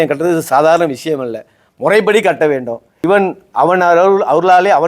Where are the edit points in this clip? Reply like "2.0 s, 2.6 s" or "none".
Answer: 2.9 s